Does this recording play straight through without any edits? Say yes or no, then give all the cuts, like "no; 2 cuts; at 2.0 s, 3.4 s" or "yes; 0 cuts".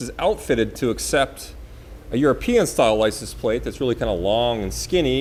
yes; 0 cuts